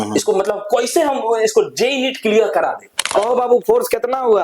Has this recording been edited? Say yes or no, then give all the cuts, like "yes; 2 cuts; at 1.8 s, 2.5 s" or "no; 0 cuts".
yes; 1 cut; at 3.0 s